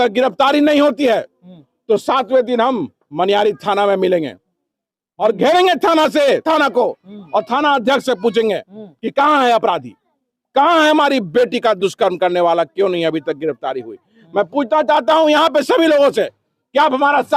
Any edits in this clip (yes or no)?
no